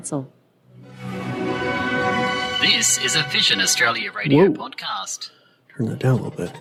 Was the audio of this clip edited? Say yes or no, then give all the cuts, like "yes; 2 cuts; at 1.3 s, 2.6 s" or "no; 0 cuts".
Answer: no; 0 cuts